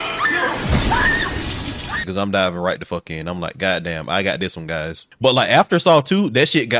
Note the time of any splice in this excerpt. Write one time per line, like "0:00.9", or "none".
0:02.0
0:05.0